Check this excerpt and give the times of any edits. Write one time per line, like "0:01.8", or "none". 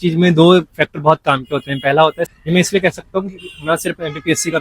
0:02.3